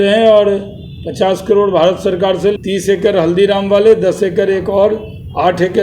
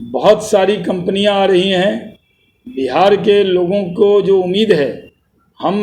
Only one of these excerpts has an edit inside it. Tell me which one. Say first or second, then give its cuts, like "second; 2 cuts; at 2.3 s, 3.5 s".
first; 1 cut; at 2.5 s